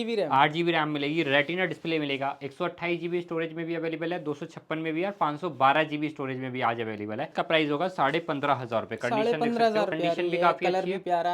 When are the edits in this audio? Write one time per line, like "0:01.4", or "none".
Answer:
0:07.3
0:10.0